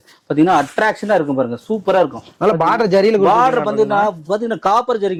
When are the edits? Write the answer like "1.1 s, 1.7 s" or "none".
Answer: none